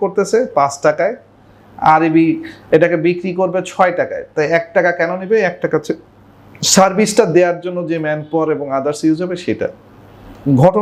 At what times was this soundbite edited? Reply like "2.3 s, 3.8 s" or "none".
none